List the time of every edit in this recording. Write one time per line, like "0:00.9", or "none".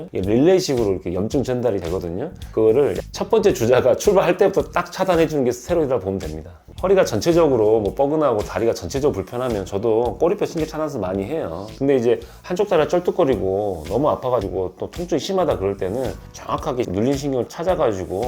0:06.6